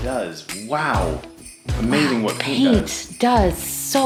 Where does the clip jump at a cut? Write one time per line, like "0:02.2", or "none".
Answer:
none